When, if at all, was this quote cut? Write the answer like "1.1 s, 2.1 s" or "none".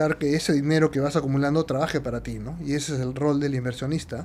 none